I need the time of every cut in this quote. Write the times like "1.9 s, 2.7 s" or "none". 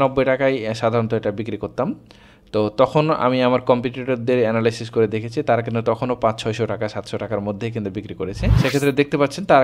8.6 s